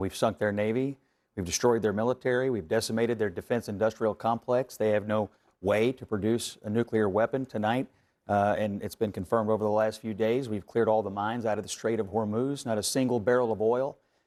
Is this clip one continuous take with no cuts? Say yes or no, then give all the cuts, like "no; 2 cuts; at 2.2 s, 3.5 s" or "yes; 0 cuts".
yes; 0 cuts